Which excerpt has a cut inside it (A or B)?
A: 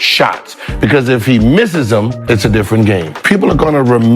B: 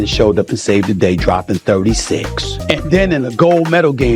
A